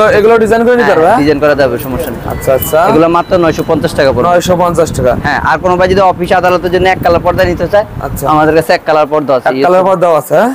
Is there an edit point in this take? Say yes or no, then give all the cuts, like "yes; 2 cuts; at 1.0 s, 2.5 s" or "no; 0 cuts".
no; 0 cuts